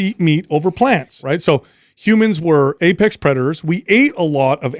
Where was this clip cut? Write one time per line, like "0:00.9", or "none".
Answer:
0:01.2